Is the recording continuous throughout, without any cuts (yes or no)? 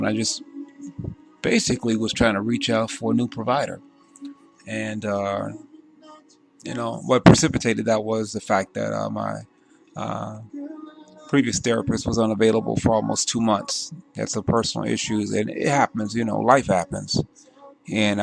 no